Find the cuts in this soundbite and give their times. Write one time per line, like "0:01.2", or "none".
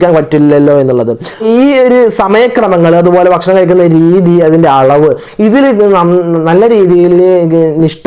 0:01.4